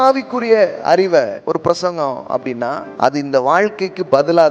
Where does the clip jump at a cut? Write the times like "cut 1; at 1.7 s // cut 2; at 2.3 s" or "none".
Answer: cut 1; at 1.4 s // cut 2; at 2.9 s